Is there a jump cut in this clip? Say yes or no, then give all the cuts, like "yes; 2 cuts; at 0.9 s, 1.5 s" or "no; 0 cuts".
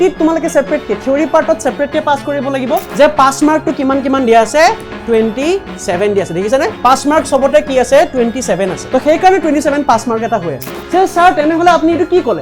yes; 2 cuts; at 2.9 s, 10.6 s